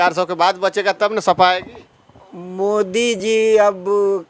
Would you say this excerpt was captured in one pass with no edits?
yes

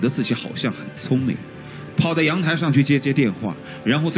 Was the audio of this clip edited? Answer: no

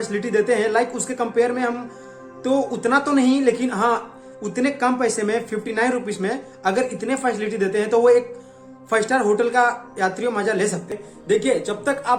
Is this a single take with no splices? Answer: no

